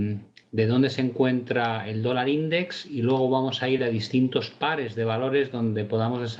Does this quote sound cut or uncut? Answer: uncut